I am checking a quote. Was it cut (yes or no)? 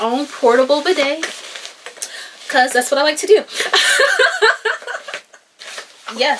no